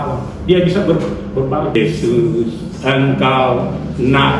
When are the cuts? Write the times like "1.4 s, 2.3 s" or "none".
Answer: 1.8 s